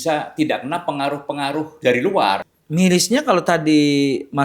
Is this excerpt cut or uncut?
cut